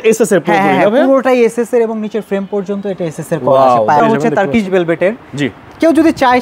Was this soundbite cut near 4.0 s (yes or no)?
yes